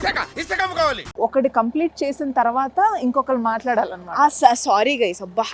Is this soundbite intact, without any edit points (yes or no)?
no